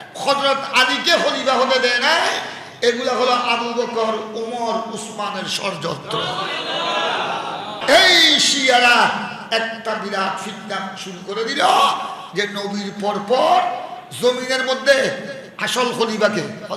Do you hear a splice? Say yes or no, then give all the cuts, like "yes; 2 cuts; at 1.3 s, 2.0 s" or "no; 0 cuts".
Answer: yes; 1 cut; at 7.8 s